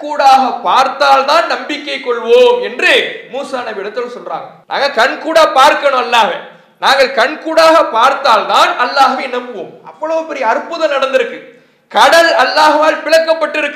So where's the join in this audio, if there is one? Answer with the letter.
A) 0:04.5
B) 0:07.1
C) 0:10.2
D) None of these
A